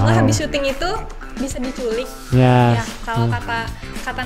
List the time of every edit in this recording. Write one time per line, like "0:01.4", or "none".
none